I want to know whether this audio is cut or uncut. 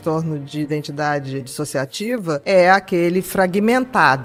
uncut